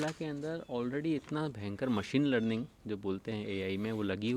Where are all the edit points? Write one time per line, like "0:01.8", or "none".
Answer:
none